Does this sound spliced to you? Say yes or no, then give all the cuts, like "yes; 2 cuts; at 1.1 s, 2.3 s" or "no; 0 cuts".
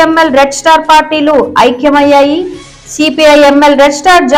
no; 0 cuts